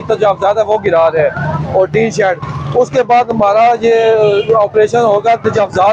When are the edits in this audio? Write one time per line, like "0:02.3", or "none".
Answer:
none